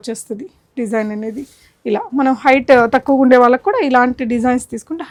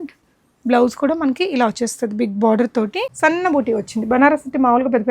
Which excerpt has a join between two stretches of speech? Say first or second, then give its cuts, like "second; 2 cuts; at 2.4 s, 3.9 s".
second; 1 cut; at 3.1 s